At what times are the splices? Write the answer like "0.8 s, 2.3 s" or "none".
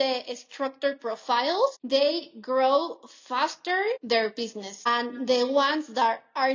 1.8 s, 4.3 s